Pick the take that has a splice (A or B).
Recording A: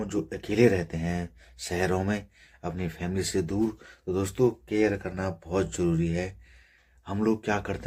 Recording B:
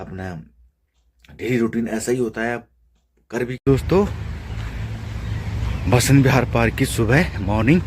B